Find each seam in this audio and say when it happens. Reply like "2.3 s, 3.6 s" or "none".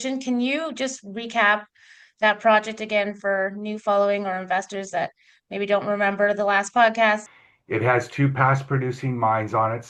7.2 s